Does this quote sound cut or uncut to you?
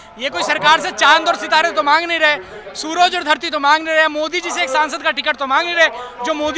uncut